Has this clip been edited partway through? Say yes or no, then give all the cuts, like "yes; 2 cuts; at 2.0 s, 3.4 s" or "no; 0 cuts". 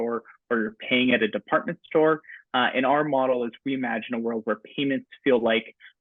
no; 0 cuts